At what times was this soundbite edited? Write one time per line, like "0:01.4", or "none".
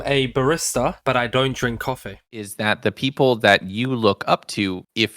0:02.5